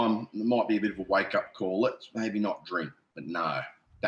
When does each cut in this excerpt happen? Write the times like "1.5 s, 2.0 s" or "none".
none